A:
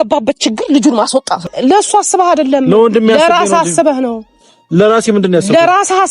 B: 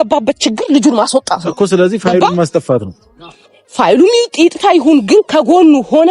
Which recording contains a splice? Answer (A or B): A